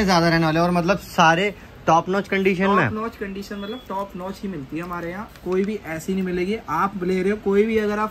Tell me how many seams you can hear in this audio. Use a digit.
0